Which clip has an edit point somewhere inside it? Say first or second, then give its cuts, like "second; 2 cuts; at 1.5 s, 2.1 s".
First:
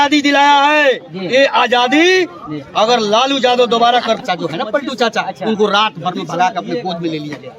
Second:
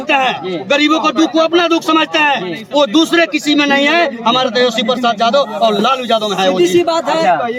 first; 1 cut; at 4.2 s